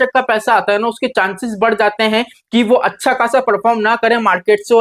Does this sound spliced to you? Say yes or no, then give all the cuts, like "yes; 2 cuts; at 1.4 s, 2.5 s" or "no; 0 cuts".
no; 0 cuts